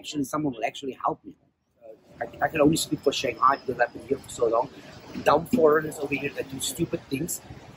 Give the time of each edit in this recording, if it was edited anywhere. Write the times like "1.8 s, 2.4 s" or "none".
2.1 s